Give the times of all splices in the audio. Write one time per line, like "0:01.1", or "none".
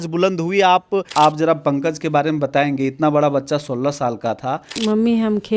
0:01.1
0:04.7